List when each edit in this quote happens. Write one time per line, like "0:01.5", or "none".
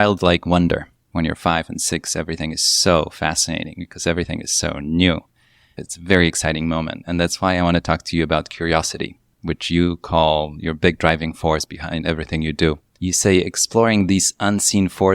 0:01.0
0:05.9
0:12.9

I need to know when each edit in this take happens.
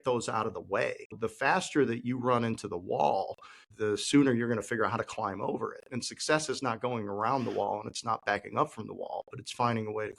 0:01.2
0:03.7

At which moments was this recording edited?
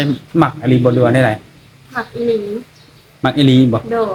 none

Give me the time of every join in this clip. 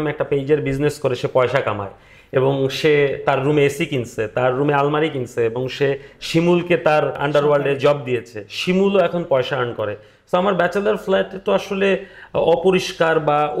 0:07.2

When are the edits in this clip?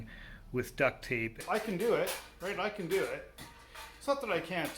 0:01.4

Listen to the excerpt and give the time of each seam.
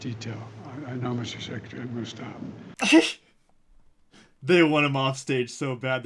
0:02.7

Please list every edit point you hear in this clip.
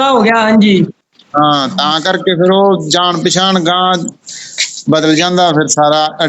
none

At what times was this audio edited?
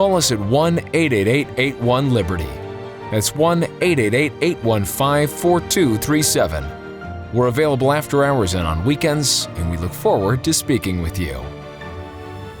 0:11.4

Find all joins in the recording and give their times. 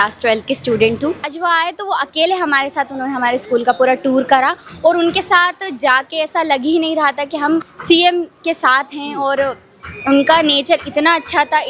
0:01.3

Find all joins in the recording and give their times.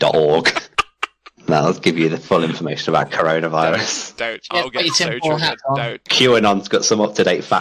0:06.0

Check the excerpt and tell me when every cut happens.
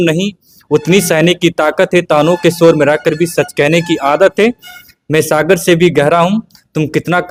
none

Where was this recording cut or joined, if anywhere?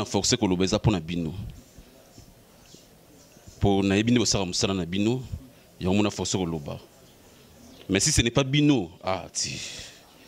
none

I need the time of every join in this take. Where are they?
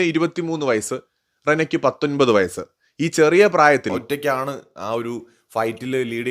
0:04.0

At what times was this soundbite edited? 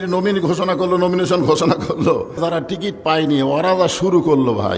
0:02.4

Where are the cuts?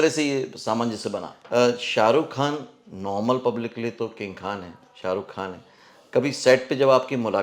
0:01.4

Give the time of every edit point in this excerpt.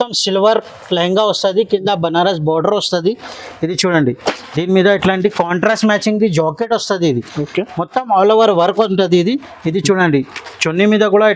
none

